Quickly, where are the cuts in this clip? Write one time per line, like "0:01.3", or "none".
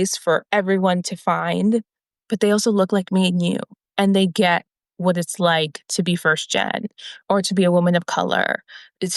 0:02.0
0:07.1

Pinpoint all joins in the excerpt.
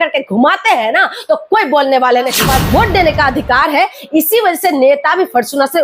0:02.4

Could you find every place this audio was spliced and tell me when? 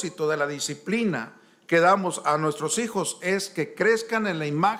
none

